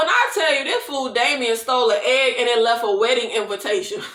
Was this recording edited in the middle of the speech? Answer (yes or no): no